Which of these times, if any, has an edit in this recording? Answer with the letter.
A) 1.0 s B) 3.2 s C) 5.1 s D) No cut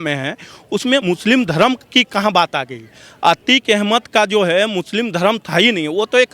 A